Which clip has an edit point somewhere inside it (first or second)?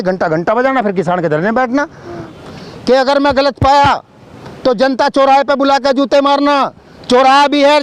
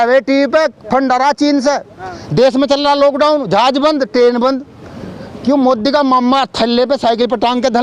first